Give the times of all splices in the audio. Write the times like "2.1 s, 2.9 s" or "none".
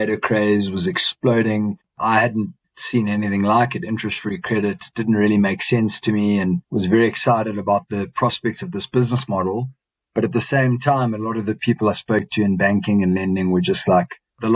none